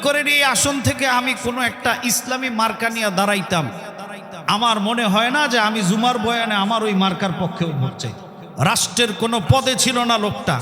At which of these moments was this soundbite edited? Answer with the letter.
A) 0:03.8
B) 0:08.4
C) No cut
B